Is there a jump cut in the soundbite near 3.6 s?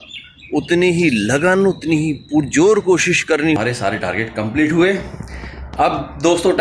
yes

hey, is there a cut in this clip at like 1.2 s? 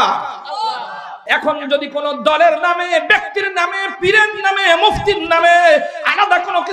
yes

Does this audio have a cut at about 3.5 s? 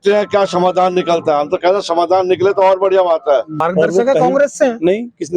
yes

